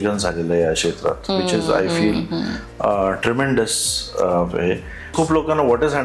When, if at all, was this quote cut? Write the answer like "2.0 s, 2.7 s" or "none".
5.1 s